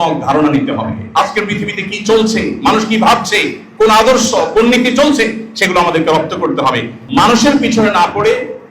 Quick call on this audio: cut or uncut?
cut